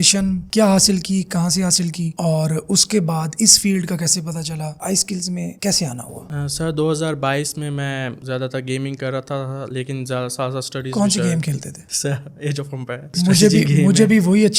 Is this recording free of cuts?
yes; 0 cuts

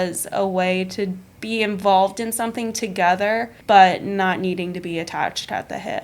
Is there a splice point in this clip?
yes; 2 cuts; at 1.3 s, 3.5 s

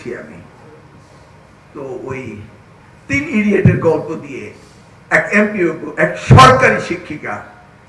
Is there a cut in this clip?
no; 0 cuts

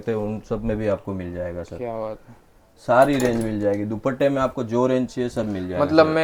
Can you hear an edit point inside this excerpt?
no; 0 cuts

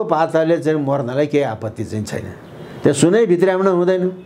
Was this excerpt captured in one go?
yes; 0 cuts

